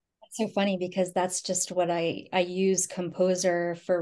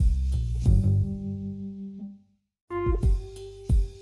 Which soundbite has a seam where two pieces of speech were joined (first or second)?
second